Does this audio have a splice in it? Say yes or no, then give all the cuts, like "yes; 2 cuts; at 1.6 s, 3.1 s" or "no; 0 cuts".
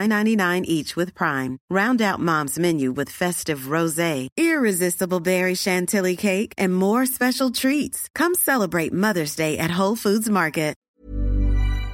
yes; 1 cut; at 10.8 s